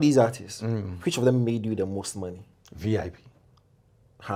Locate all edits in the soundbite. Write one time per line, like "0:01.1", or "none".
none